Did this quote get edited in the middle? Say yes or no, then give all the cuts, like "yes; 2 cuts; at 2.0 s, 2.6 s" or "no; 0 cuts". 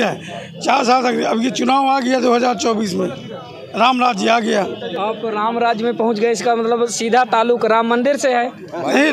no; 0 cuts